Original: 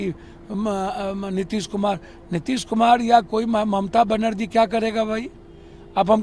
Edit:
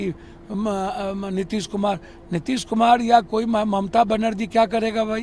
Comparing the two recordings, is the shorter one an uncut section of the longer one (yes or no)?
yes